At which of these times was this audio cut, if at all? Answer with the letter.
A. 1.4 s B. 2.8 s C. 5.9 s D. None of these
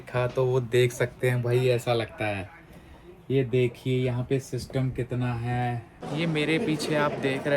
C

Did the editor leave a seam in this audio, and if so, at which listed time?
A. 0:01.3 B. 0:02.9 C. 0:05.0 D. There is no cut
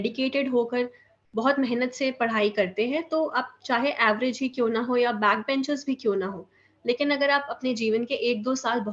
D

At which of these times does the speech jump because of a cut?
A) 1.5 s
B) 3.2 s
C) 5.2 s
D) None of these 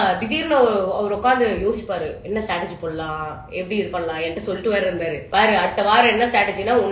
C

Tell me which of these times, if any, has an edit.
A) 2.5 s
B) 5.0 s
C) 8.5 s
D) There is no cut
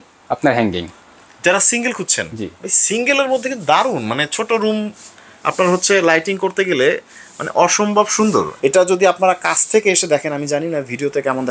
C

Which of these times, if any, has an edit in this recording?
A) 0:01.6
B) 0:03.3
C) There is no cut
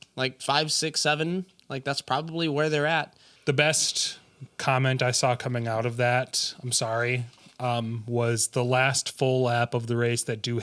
B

